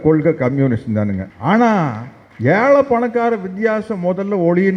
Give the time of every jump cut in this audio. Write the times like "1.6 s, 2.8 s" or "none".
1.3 s